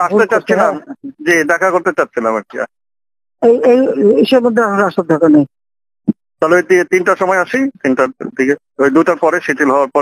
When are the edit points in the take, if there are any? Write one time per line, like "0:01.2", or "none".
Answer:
none